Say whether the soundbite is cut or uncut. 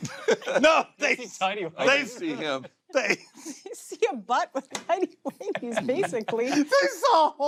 uncut